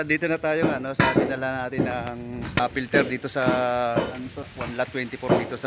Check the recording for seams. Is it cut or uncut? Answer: cut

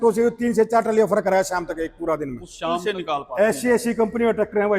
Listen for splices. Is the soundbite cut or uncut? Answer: cut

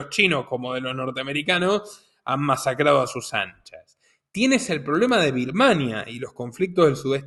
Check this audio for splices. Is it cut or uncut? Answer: uncut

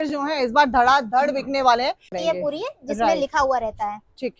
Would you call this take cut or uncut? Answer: cut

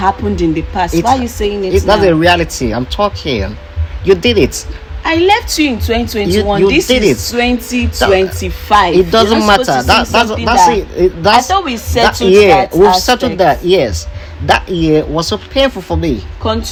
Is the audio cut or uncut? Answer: uncut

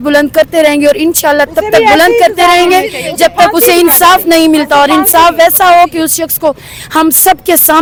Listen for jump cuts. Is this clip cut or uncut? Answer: uncut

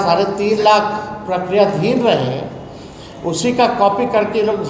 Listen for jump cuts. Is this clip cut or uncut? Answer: uncut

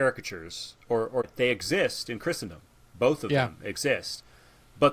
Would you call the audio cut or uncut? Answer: cut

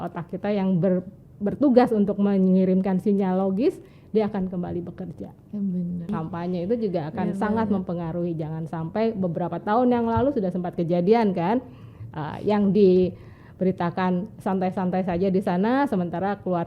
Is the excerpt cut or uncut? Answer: cut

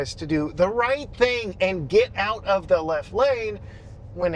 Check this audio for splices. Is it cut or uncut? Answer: uncut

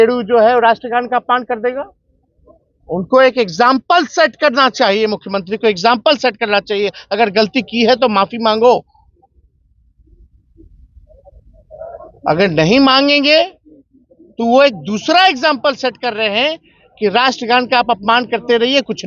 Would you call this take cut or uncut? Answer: uncut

